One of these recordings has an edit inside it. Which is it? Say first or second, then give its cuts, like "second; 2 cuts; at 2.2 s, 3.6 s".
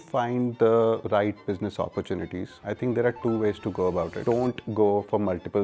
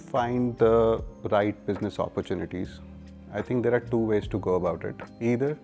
first; 3 cuts; at 1.0 s, 2.5 s, 4.4 s